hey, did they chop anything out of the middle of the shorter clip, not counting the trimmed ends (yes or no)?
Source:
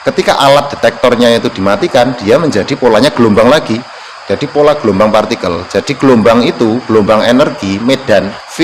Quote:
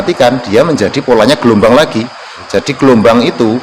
yes